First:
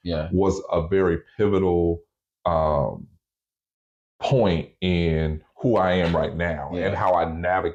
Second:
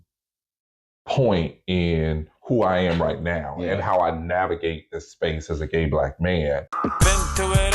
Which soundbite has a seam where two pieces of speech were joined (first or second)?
second